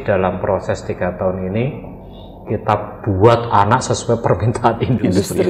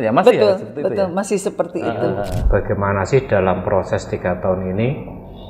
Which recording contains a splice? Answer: second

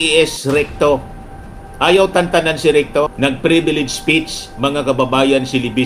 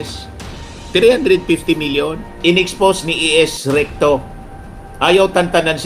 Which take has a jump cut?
second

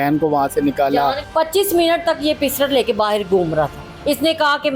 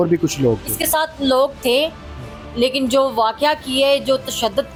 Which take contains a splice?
first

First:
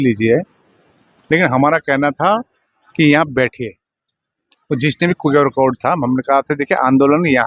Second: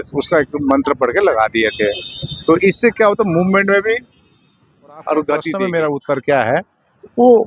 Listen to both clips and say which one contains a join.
second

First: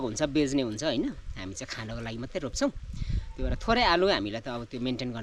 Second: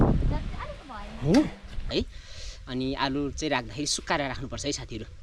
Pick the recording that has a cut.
second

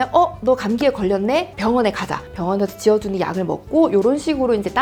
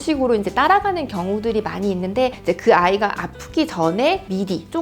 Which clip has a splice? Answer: second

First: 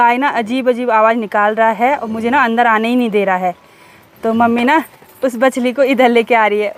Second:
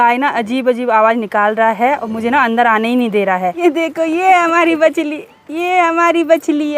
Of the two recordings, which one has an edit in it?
second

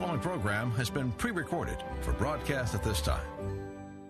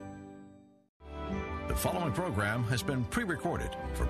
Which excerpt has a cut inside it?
second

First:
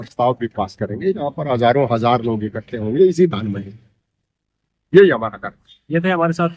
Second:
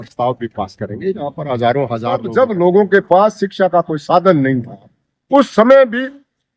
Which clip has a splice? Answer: second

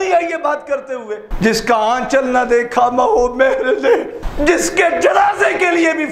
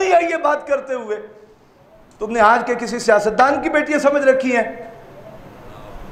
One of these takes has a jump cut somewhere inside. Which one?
first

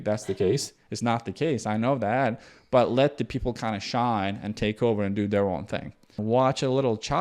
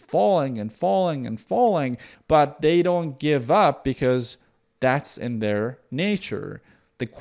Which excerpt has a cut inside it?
first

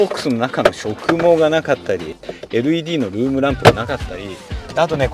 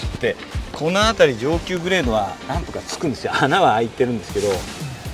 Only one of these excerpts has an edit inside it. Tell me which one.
first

